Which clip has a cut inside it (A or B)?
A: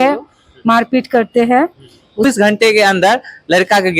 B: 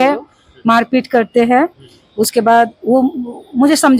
A